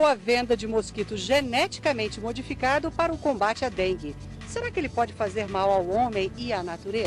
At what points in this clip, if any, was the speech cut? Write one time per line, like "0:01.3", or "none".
none